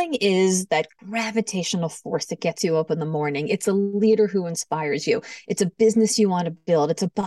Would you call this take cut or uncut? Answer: cut